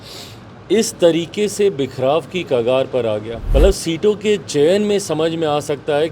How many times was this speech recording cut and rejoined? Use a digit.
1